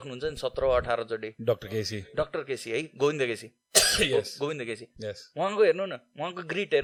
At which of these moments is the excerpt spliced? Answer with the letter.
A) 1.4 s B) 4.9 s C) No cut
C